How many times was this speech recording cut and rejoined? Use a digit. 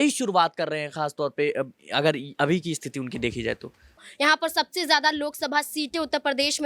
1